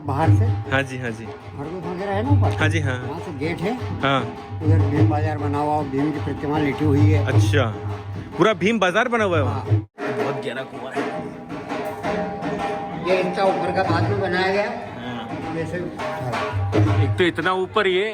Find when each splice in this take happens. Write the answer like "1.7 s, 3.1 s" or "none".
9.9 s